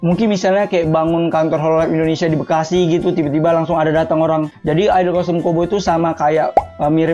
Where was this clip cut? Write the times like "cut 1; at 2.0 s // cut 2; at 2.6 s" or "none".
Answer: cut 1; at 4.5 s